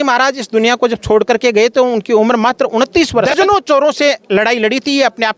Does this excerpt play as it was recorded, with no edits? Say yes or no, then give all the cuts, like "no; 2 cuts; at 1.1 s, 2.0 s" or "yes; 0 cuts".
no; 1 cut; at 3.3 s